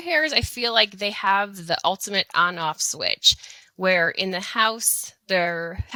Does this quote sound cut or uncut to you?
uncut